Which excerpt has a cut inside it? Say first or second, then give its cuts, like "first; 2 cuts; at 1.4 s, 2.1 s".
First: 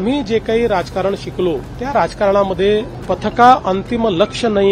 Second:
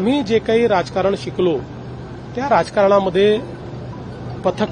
first; 2 cuts; at 1.7 s, 2.9 s